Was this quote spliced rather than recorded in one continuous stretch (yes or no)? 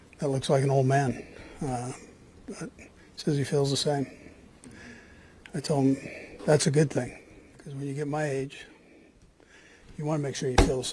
no